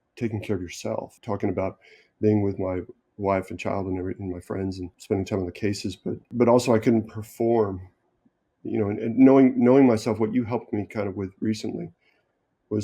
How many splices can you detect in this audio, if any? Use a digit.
3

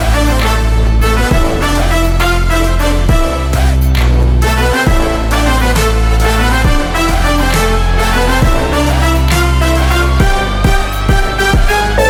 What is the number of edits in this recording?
0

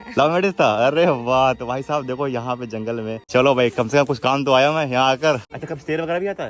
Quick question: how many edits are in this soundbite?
2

